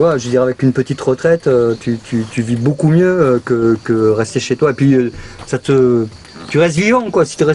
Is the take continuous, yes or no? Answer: yes